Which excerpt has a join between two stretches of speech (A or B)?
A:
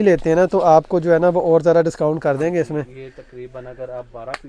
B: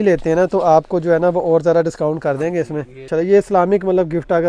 B